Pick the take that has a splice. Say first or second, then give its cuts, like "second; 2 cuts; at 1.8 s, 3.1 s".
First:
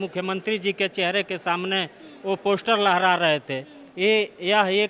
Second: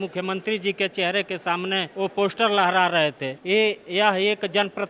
second; 2 cuts; at 1.9 s, 3.3 s